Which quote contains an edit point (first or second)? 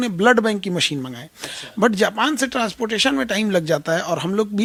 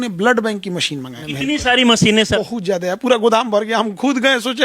second